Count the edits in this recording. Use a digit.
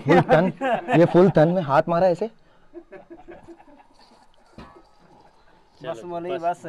0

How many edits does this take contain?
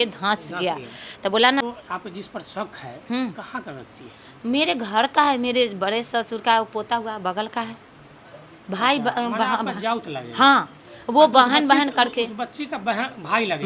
1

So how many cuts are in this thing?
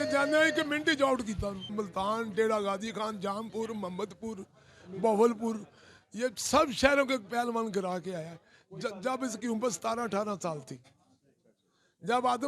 1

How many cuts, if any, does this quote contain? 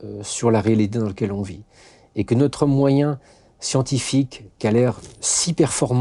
0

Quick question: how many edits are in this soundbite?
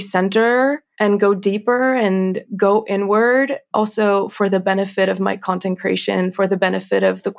3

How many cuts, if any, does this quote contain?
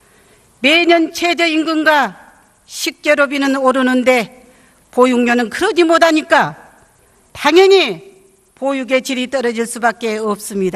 1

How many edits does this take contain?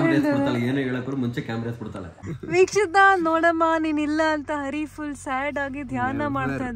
1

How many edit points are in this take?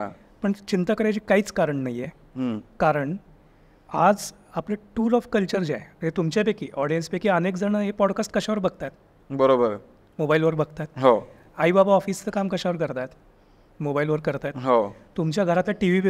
0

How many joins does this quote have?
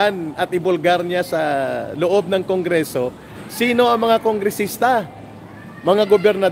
0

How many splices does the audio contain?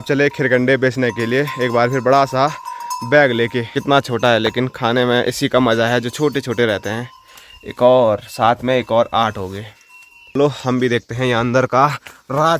2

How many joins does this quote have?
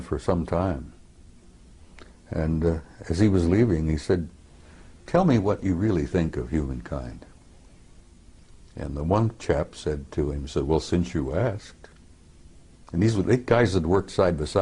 0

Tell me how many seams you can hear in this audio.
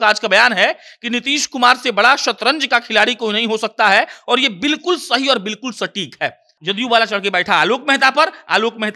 1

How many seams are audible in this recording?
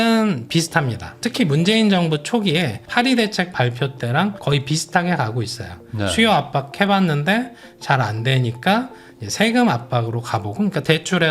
1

